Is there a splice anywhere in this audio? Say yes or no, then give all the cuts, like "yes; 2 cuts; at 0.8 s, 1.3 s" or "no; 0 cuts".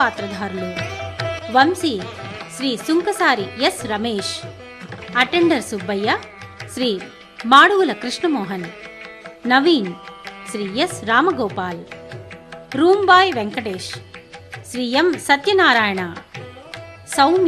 no; 0 cuts